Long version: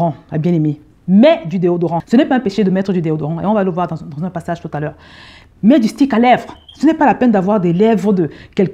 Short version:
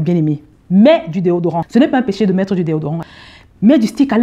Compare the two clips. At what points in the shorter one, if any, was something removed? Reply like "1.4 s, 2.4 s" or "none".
3.0 s

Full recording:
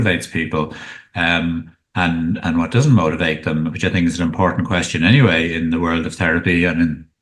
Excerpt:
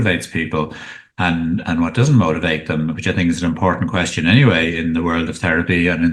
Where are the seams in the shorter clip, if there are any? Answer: 1.0 s

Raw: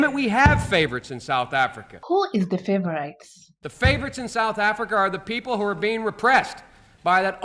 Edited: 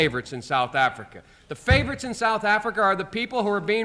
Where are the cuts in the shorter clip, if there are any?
1.1 s

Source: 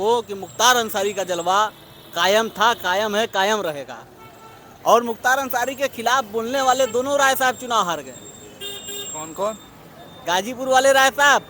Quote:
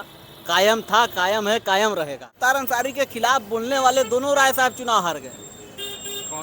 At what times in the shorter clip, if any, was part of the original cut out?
2.3 s

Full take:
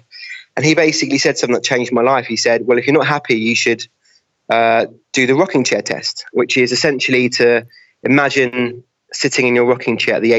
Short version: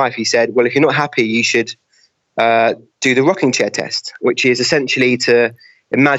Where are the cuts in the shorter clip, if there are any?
none

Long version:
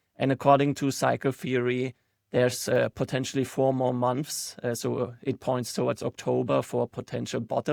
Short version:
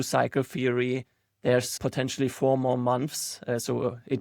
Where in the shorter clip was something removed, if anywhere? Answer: 1.8 s

